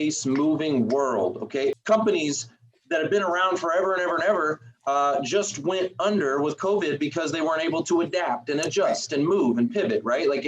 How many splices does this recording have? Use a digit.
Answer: 1